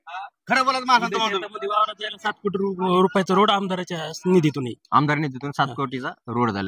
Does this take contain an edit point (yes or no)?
no